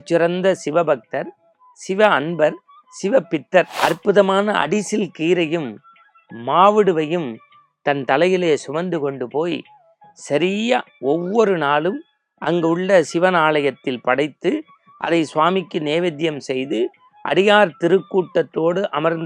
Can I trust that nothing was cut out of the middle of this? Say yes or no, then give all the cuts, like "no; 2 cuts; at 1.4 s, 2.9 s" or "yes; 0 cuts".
no; 1 cut; at 3.7 s